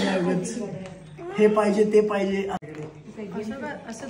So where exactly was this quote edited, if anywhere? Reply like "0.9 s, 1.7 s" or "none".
2.6 s